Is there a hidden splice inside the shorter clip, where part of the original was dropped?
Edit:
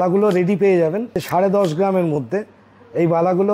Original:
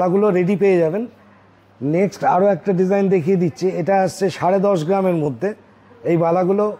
yes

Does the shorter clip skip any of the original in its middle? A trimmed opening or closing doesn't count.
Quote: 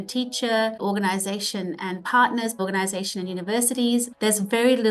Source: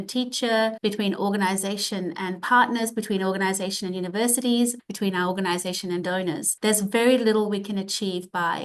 yes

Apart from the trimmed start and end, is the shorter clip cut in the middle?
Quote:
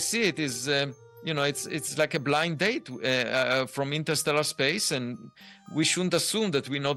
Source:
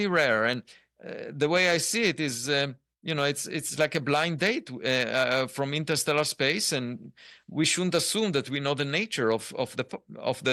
no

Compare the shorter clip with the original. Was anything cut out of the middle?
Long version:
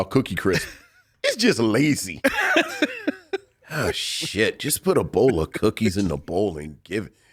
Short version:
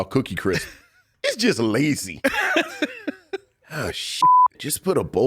no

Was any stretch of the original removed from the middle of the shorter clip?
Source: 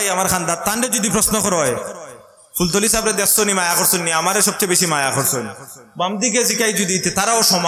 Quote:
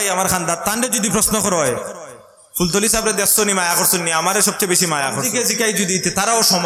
yes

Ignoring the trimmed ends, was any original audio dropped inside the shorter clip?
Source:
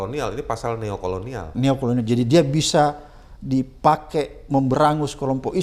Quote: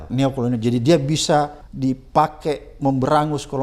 yes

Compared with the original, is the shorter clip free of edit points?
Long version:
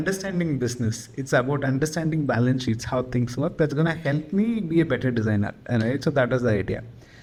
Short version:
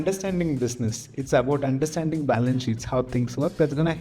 yes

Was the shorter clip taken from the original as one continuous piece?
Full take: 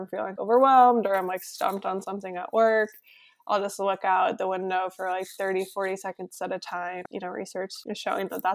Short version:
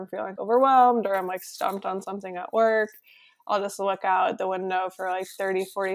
yes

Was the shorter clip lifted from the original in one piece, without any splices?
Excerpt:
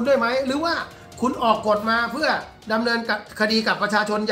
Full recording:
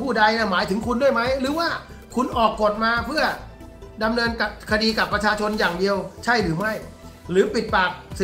no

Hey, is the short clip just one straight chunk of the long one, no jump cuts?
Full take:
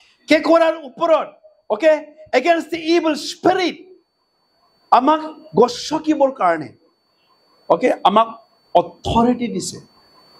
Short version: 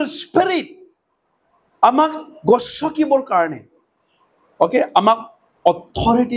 yes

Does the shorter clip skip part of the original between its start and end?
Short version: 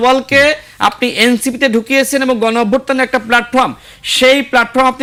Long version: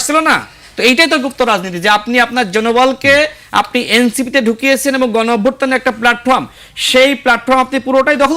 no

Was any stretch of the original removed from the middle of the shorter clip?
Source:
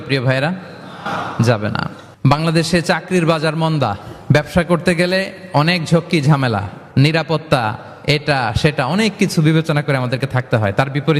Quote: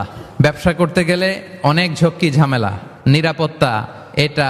no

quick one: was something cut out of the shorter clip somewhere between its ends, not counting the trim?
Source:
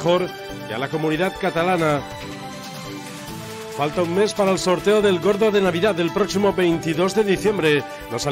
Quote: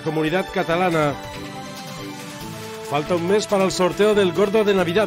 no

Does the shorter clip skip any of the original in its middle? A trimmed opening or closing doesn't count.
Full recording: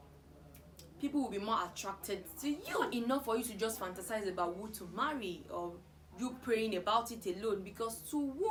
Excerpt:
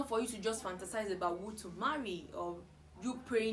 no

